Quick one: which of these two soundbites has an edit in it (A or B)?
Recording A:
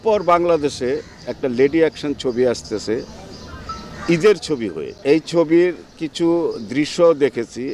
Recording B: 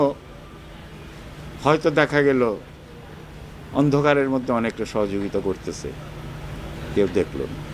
A